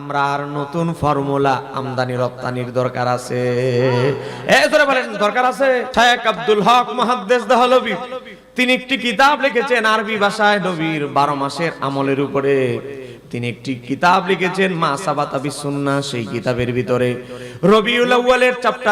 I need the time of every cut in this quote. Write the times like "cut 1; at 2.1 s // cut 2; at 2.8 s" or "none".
cut 1; at 5.9 s